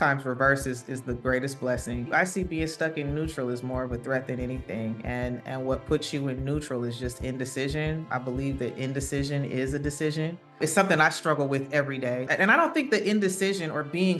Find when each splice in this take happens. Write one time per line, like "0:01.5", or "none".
0:02.1
0:08.1
0:10.6
0:12.3